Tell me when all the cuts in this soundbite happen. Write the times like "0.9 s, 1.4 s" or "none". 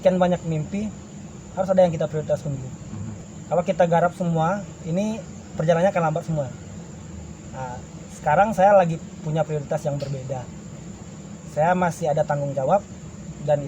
none